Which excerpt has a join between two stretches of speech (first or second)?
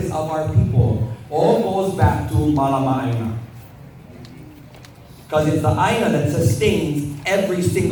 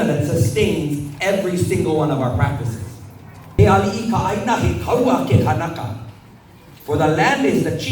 second